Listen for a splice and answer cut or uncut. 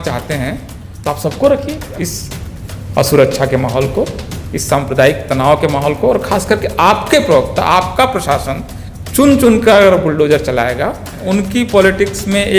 cut